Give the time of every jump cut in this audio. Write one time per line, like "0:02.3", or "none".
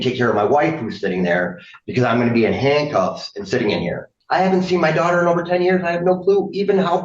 0:04.2